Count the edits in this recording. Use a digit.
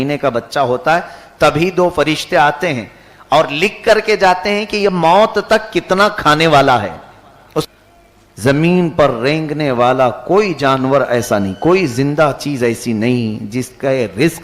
1